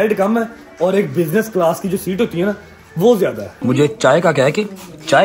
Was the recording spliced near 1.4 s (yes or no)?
no